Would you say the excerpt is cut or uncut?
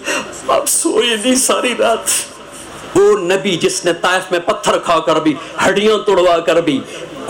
cut